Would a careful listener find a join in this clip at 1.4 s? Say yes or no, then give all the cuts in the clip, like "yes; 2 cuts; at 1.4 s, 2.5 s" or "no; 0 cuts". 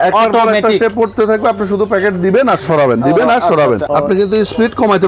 no; 1 cut; at 3.8 s